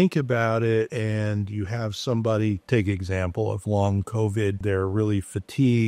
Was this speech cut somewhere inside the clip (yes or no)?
yes